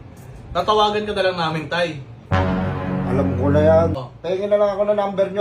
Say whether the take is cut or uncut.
cut